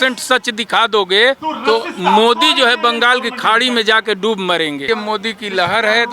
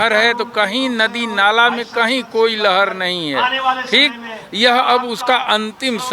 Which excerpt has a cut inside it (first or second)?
first